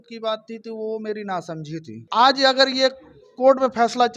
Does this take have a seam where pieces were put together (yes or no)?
yes